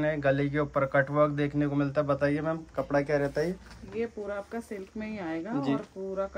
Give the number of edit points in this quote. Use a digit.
0